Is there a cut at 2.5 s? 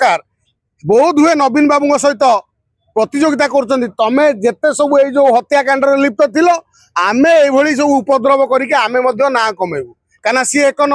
no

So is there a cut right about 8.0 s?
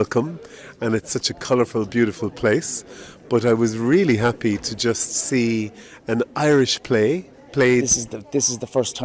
yes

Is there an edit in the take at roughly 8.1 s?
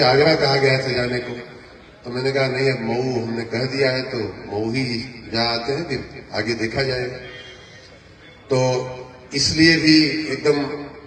no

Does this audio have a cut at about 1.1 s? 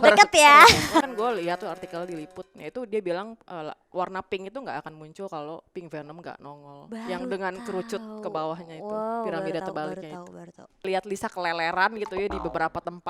yes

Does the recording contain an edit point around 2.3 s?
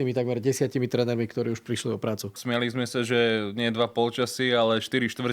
yes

